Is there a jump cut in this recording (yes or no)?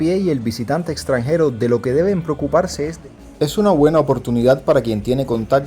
yes